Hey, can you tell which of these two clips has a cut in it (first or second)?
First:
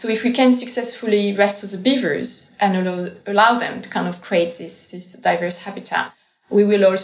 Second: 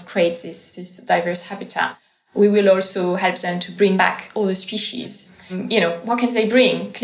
second